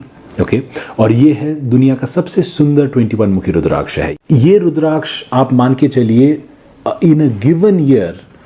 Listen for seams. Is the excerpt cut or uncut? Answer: cut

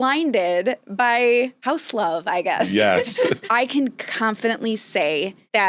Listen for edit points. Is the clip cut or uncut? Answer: uncut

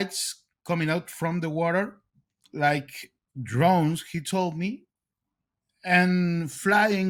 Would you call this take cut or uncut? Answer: uncut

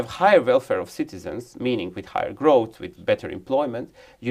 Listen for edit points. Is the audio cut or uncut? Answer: uncut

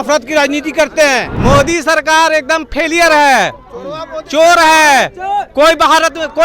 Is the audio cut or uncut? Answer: cut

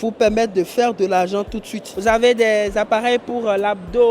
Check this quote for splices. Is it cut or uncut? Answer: cut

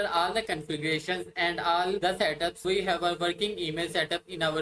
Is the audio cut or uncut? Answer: uncut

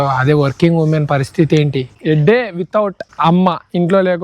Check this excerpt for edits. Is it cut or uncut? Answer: cut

